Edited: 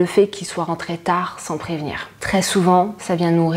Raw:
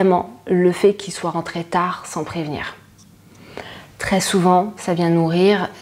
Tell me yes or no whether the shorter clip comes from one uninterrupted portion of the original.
no